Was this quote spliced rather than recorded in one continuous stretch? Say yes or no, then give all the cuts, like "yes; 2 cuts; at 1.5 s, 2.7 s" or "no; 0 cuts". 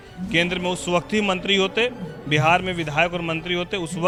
no; 0 cuts